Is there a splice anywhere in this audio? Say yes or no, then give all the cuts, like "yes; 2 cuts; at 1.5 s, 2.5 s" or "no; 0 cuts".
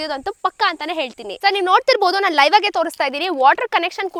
no; 0 cuts